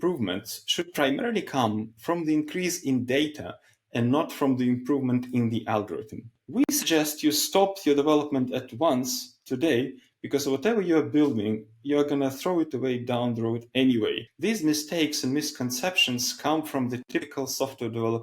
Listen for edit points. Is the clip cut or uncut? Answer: cut